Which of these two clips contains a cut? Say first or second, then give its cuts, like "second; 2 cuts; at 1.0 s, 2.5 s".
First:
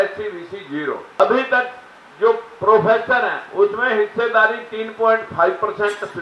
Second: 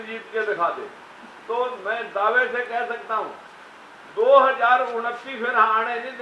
first; 1 cut; at 1.2 s